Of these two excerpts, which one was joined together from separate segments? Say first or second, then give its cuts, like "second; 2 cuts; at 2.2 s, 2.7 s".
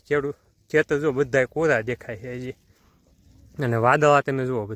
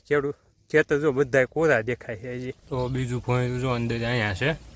second; 1 cut; at 2.6 s